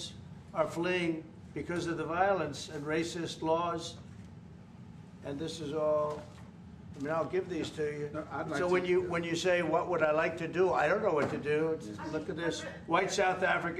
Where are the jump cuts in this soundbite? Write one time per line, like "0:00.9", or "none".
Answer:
none

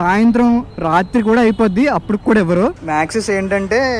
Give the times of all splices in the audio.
0:02.8

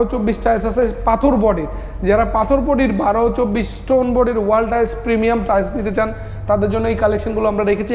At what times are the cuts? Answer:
none

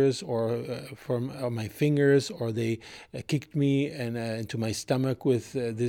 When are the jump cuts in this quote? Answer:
none

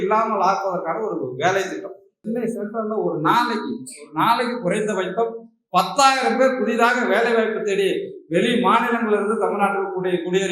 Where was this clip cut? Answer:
0:02.2

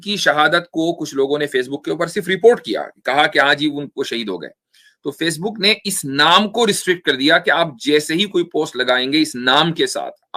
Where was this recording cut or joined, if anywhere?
none

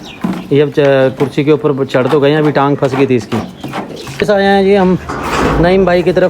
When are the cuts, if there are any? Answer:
0:04.0

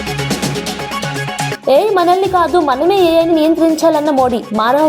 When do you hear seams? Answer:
0:01.5

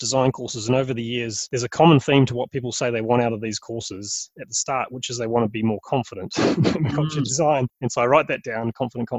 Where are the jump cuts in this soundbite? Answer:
0:01.4
0:07.8

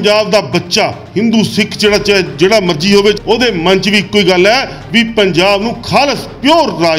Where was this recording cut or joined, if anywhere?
0:03.2

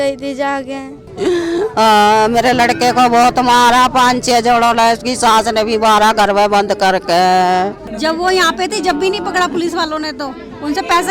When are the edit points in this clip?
0:01.0
0:07.8

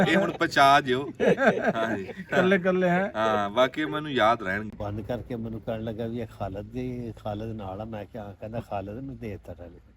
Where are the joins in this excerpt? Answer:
0:04.7

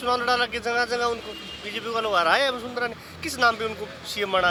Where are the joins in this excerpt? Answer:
none

